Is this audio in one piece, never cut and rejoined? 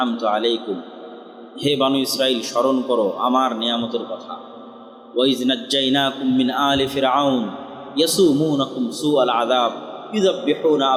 yes; 0 cuts

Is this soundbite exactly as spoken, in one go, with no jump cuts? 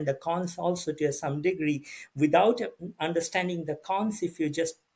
yes; 0 cuts

